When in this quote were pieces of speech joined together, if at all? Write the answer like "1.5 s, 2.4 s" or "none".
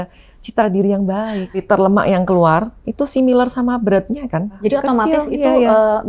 1.6 s, 4.6 s